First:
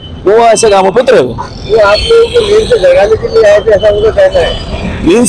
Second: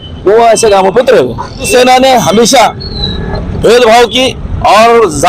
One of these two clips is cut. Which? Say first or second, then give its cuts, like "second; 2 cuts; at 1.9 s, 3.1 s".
second; 1 cut; at 1.7 s